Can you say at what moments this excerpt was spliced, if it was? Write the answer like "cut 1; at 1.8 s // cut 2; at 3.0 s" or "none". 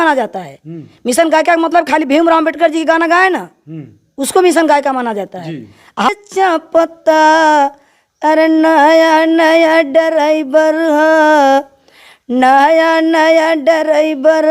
cut 1; at 6.1 s

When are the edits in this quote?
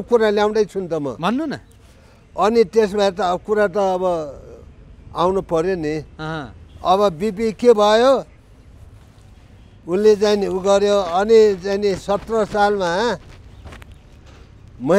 none

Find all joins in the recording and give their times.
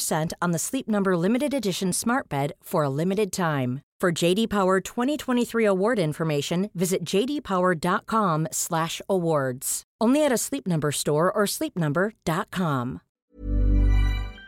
cut 1; at 13.2 s

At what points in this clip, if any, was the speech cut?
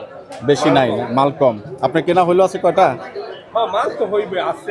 none

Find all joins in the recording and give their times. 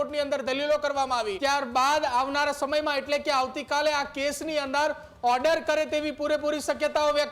cut 1; at 1.3 s

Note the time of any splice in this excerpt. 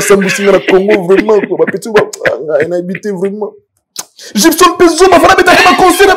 none

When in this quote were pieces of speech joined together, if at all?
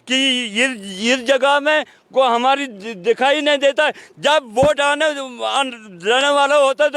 none

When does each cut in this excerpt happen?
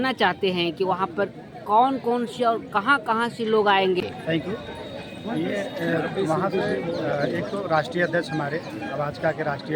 none

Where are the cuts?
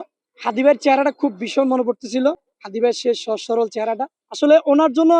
cut 1; at 4.1 s

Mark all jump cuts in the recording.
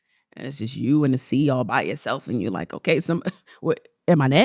cut 1; at 3.5 s

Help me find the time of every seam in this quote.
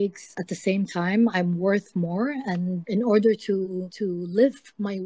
cut 1; at 2.8 s // cut 2; at 3.9 s

